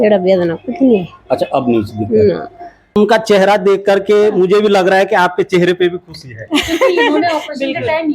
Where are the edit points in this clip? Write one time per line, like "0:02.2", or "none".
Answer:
0:03.0